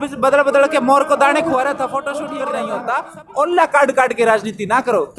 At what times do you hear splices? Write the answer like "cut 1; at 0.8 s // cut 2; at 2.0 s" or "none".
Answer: cut 1; at 2.3 s